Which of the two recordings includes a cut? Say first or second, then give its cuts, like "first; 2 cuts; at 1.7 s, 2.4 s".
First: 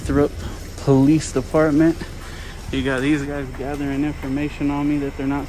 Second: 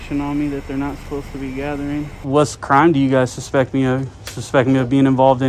second; 1 cut; at 2.2 s